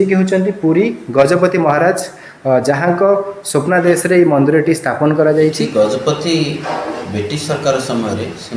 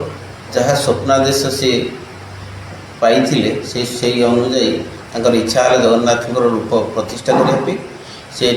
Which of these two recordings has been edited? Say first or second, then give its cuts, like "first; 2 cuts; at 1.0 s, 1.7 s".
first; 1 cut; at 5.6 s